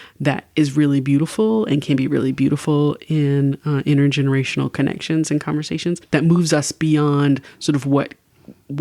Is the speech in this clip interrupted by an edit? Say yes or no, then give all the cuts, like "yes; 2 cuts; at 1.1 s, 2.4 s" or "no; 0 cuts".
yes; 1 cut; at 6.0 s